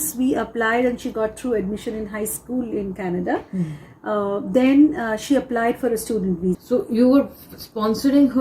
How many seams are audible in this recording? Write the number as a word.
one